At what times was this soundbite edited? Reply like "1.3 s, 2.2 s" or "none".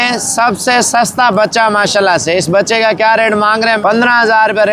3.8 s